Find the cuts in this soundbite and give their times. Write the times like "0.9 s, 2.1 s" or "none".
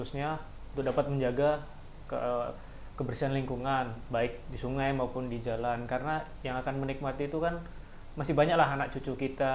none